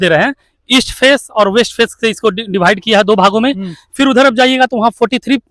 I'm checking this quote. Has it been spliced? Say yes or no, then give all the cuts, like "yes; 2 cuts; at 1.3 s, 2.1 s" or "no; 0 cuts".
no; 0 cuts